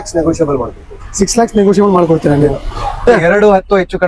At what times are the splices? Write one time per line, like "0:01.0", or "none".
0:03.0